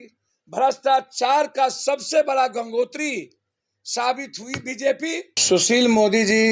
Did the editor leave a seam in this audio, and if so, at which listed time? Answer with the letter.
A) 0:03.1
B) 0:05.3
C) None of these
B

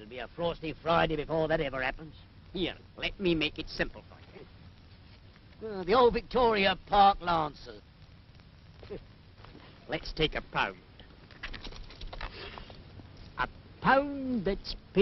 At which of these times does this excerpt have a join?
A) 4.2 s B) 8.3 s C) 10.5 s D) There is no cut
B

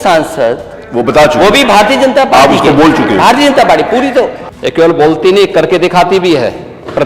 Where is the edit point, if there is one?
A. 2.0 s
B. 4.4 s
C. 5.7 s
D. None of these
B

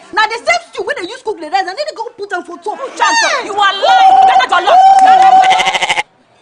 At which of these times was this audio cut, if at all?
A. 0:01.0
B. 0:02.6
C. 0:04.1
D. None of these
C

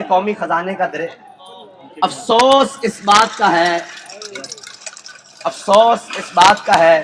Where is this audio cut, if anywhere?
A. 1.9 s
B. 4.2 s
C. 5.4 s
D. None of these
B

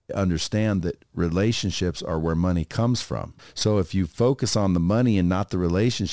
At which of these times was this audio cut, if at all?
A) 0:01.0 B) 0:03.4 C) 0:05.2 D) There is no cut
B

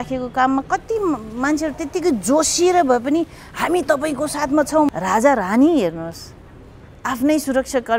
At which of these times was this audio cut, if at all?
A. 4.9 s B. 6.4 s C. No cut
A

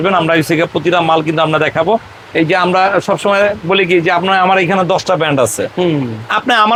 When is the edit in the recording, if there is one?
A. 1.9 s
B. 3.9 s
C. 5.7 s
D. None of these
D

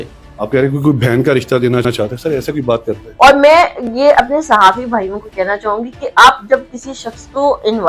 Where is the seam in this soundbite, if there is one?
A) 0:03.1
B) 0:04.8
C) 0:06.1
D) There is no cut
A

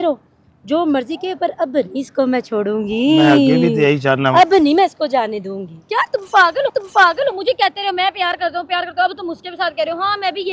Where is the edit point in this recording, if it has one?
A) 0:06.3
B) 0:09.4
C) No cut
C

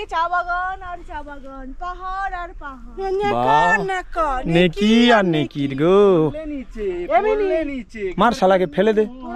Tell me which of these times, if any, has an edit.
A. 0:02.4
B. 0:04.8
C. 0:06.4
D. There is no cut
D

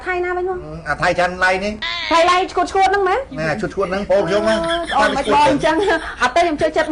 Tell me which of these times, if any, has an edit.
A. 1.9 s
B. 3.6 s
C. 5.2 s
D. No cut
A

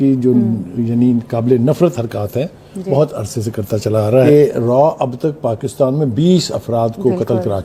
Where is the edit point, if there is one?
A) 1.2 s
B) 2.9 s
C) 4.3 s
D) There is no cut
C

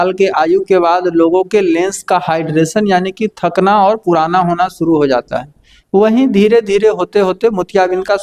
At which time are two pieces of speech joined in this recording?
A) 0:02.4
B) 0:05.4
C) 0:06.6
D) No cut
D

